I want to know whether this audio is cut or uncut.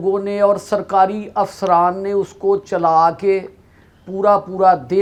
uncut